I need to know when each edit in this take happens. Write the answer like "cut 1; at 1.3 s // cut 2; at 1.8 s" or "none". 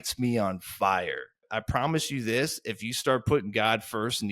cut 1; at 1.5 s

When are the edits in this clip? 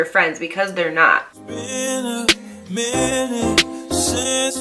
cut 1; at 1.3 s

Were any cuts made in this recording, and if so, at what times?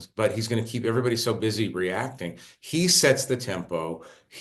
none

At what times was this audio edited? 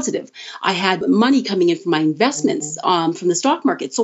cut 1; at 1.0 s

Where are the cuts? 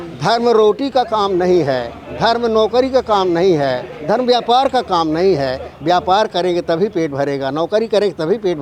none

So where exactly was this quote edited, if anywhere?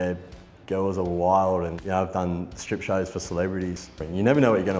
cut 1; at 3.9 s

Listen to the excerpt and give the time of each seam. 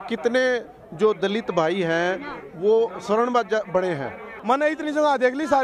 cut 1; at 4.3 s

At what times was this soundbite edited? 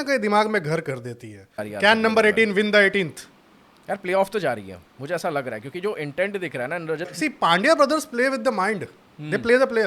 cut 1; at 1.6 s // cut 2; at 7.1 s

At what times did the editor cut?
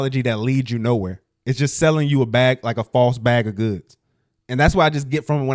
none

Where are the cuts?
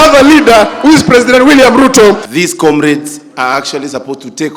cut 1; at 2.2 s

